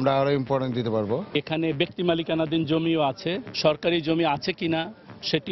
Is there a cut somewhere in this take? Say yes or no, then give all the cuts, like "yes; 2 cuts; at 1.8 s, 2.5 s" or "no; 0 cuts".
yes; 1 cut; at 1.3 s